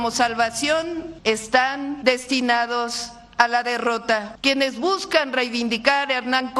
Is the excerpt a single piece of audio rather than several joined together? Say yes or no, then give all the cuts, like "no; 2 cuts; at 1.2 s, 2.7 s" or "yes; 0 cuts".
no; 3 cuts; at 1.1 s, 2.0 s, 4.3 s